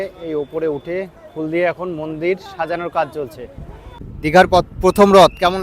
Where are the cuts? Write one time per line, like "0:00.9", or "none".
0:03.9

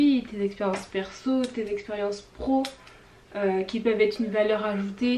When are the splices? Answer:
none

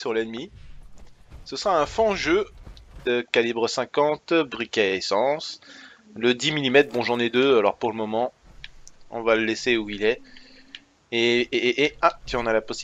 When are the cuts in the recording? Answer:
none

